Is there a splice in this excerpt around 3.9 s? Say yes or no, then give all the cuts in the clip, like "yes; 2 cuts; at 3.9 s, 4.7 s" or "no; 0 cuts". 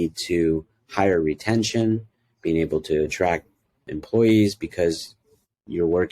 yes; 1 cut; at 3.9 s